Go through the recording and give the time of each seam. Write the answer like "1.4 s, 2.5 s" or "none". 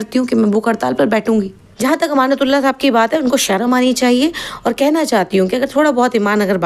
1.6 s